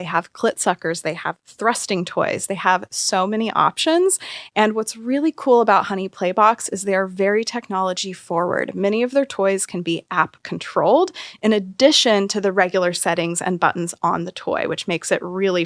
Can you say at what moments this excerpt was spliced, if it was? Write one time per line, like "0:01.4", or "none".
none